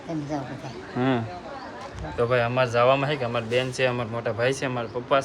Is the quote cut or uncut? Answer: uncut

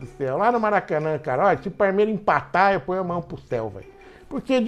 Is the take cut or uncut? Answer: uncut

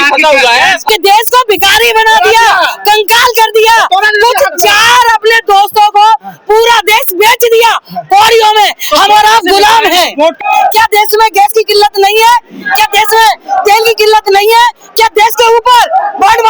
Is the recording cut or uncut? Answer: cut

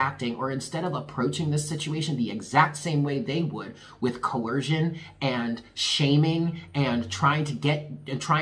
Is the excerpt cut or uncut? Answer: uncut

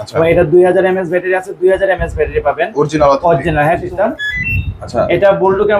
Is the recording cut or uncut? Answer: cut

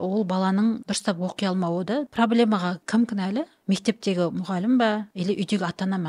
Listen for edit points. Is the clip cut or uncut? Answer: cut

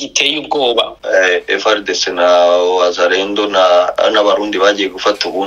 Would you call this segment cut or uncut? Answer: cut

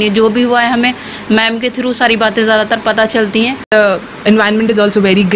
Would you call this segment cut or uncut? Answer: cut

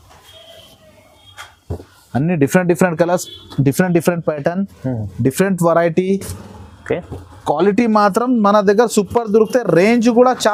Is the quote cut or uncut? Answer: uncut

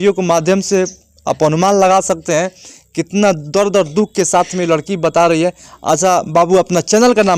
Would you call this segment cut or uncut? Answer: uncut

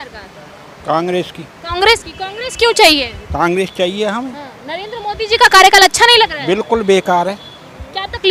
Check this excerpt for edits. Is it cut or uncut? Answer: uncut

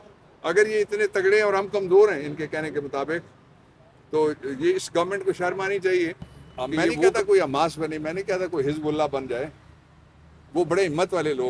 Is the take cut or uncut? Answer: cut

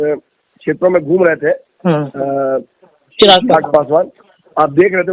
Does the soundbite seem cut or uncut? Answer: uncut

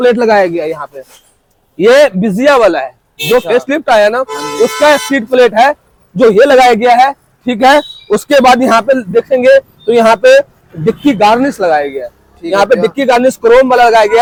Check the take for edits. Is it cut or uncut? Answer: uncut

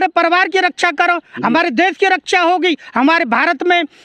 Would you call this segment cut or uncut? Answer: uncut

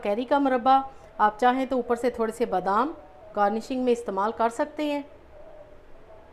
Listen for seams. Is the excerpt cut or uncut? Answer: uncut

